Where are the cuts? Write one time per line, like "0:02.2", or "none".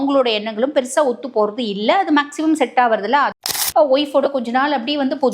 0:03.4